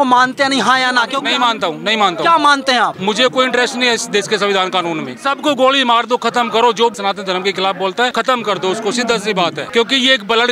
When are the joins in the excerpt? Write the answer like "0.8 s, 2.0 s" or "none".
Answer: 1.2 s, 3.0 s, 5.1 s, 7.0 s, 8.1 s, 9.6 s